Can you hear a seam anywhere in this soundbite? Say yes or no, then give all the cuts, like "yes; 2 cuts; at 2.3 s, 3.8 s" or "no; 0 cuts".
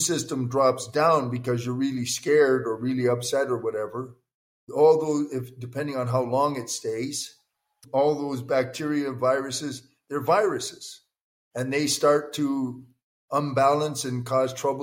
no; 0 cuts